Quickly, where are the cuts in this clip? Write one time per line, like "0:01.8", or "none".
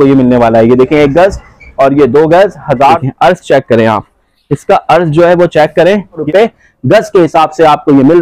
0:03.0
0:06.2